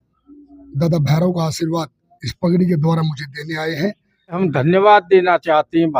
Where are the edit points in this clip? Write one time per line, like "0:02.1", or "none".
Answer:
0:04.4